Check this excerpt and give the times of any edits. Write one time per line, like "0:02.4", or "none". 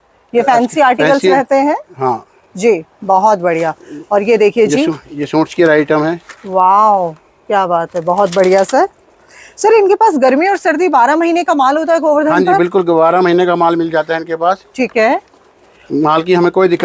none